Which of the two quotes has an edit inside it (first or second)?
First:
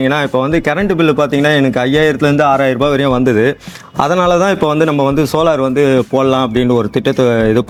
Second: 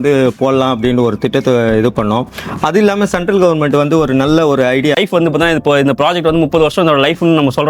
second